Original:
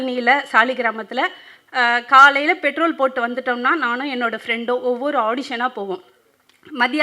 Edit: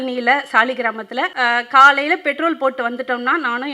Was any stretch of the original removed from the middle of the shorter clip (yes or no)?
yes